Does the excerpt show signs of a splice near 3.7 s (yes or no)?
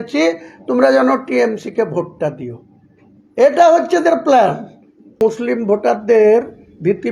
no